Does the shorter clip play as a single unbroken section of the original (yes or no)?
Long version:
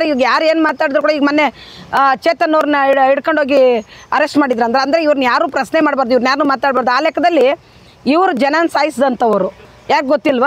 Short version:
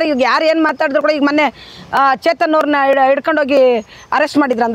yes